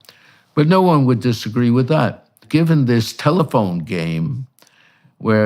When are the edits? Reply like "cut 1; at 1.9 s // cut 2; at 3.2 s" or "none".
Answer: cut 1; at 2.4 s